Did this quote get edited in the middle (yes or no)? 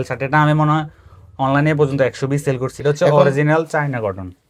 no